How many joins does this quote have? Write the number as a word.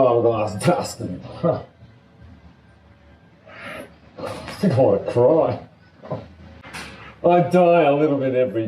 one